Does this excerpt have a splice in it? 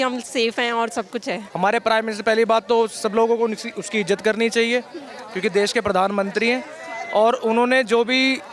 yes; 1 cut; at 1.5 s

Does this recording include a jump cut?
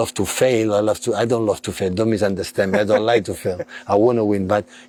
no; 0 cuts

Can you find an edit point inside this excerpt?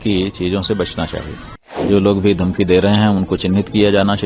yes; 1 cut; at 1.8 s

